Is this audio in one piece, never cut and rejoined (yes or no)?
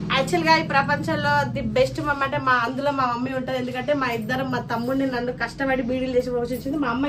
yes